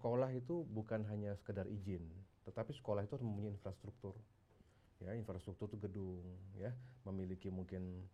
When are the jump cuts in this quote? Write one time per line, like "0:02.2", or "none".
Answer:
none